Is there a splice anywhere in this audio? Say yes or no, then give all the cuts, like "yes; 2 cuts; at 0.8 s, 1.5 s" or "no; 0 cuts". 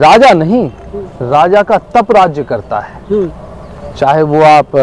no; 0 cuts